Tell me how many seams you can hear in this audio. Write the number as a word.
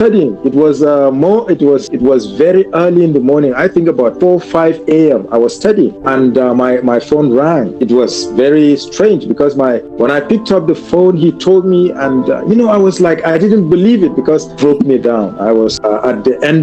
seven